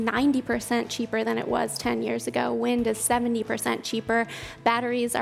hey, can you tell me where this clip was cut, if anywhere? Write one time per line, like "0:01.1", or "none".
none